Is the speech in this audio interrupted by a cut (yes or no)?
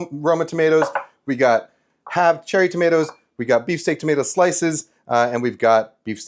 no